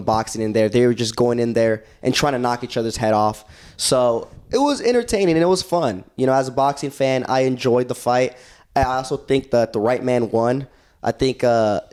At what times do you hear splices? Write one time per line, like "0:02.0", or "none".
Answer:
none